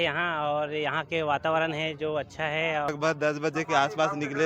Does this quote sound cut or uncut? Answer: cut